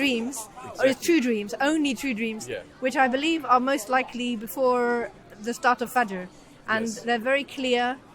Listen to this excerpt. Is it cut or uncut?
uncut